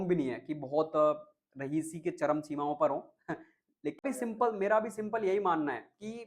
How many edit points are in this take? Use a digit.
1